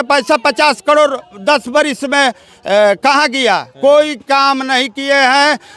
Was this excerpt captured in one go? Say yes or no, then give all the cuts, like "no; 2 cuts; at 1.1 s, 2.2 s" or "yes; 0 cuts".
yes; 0 cuts